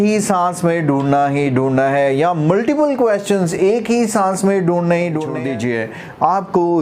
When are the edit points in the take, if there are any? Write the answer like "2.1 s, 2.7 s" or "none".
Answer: 5.3 s